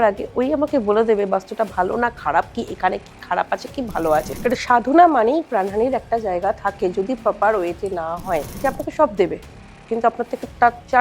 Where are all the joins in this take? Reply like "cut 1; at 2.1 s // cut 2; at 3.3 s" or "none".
cut 1; at 4.3 s // cut 2; at 8.6 s